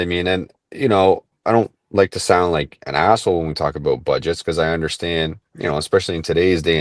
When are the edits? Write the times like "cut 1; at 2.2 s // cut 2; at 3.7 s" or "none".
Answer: cut 1; at 1.3 s